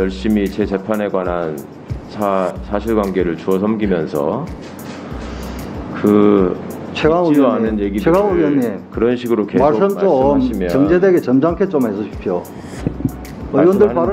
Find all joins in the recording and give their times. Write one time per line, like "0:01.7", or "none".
none